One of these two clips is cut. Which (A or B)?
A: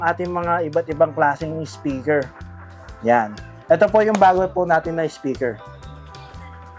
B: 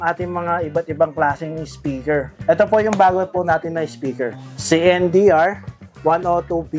B